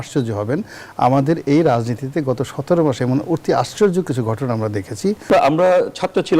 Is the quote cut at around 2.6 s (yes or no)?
no